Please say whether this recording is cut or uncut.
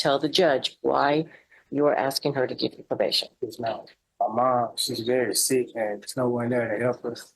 cut